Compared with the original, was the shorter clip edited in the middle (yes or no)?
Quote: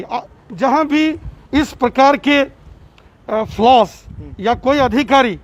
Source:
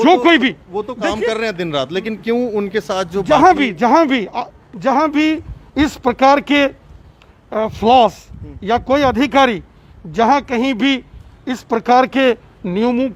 no